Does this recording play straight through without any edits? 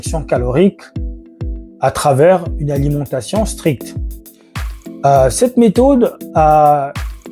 yes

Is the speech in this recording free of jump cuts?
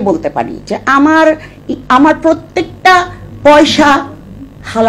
yes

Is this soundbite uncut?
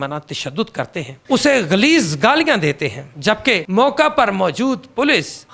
yes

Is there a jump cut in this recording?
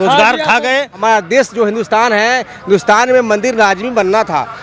yes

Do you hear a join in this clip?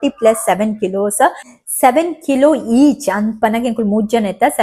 no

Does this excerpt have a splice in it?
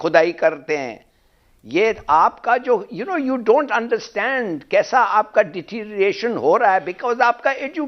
no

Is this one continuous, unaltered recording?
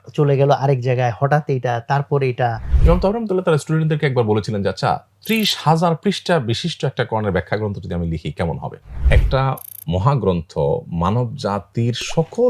no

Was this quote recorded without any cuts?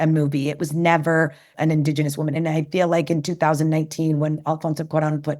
no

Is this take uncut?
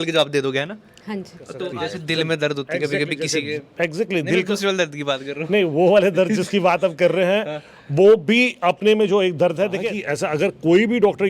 no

